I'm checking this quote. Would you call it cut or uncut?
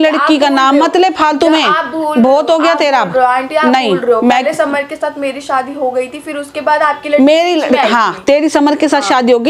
uncut